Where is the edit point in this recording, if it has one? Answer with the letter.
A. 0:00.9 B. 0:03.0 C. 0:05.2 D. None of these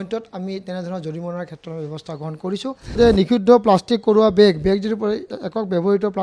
B